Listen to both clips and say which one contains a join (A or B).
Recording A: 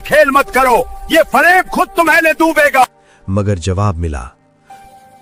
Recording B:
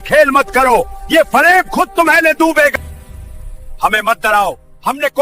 B